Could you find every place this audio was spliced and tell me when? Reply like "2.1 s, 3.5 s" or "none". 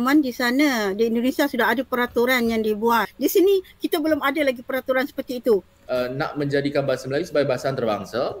5.7 s